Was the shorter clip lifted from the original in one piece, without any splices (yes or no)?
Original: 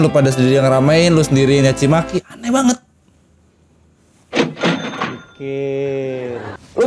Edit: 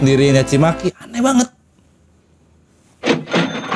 yes